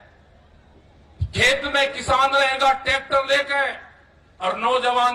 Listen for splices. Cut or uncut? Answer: uncut